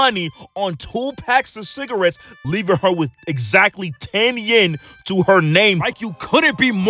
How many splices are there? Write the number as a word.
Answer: one